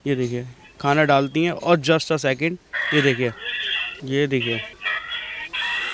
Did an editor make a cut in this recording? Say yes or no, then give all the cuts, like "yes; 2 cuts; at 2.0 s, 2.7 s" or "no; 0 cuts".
no; 0 cuts